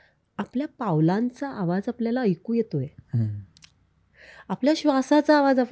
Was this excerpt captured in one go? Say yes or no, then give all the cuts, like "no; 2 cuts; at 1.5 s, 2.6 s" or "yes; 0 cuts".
yes; 0 cuts